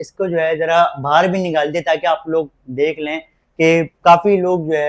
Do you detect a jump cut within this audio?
no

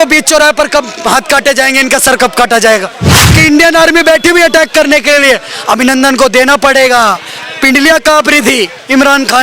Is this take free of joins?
no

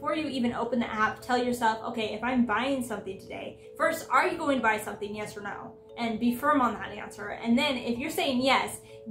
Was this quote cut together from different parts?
no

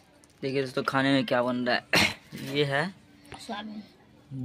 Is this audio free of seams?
yes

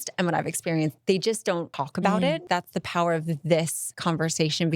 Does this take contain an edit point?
yes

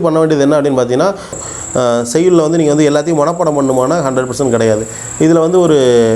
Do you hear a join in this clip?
yes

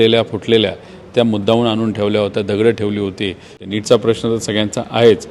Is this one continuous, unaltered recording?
no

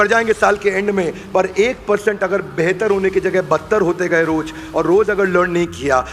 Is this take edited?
no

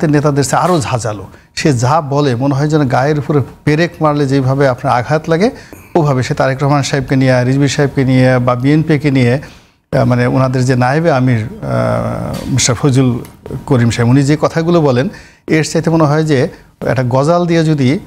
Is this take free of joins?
yes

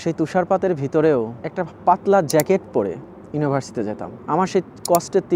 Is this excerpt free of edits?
no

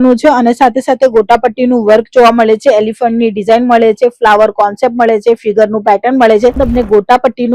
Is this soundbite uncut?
no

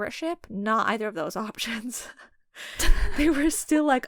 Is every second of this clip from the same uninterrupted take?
yes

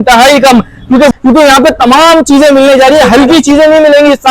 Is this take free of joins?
no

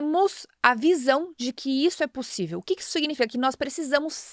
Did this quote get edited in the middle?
no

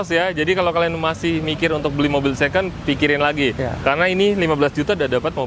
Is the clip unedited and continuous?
yes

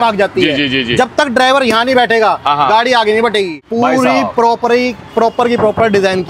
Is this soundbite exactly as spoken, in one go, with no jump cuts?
no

